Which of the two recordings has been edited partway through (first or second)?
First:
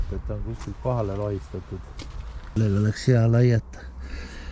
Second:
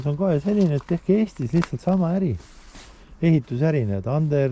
first